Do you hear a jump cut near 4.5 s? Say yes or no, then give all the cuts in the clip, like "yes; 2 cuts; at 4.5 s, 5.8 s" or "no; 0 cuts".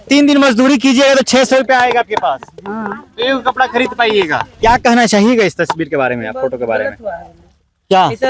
yes; 1 cut; at 4.5 s